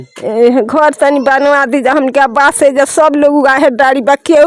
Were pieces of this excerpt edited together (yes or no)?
no